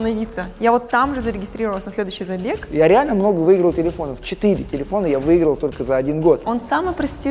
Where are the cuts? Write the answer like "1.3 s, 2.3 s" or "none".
2.7 s, 6.5 s